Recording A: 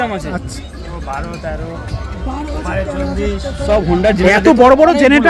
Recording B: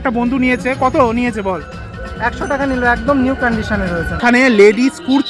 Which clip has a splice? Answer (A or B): B